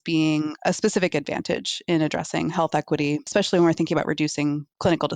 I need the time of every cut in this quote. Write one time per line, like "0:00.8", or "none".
0:03.3